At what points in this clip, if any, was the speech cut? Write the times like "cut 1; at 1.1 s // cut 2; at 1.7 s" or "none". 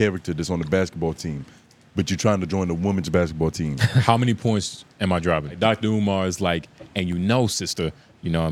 cut 1; at 5.6 s